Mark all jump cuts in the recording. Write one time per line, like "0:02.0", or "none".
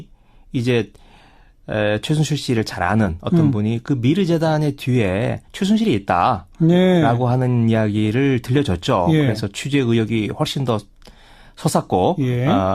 none